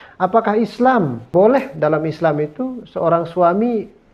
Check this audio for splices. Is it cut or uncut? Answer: cut